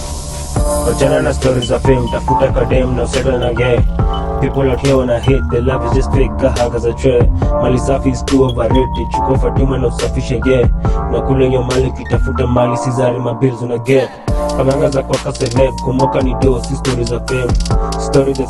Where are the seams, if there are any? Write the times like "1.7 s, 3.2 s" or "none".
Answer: none

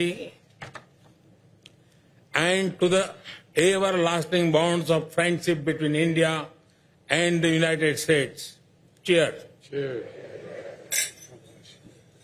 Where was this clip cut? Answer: none

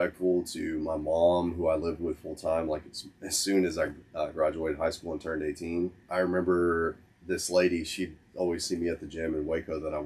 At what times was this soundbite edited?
6.0 s

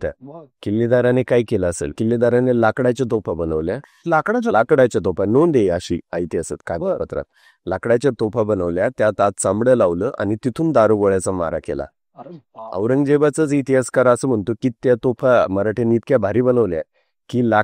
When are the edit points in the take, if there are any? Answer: 2.0 s

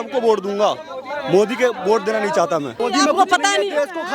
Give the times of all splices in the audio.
2.7 s

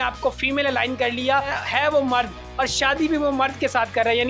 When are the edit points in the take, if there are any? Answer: 1.6 s

